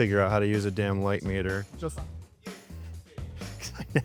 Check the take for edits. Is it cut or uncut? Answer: uncut